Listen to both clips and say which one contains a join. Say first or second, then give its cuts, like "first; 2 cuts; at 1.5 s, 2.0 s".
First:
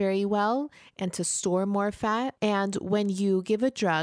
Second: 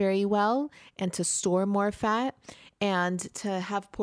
first; 1 cut; at 2.3 s